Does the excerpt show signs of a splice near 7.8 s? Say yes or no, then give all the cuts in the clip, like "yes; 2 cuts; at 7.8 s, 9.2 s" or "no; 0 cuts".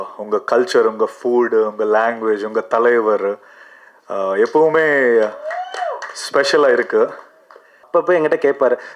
yes; 1 cut; at 7.8 s